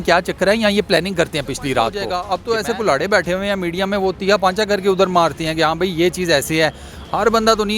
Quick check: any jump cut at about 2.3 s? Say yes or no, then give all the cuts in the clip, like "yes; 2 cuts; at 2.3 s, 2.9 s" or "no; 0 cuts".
yes; 1 cut; at 2.3 s